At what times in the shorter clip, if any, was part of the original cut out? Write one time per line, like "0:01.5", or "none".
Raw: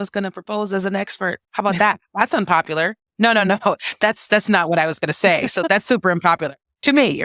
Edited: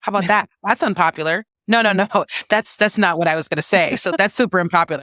none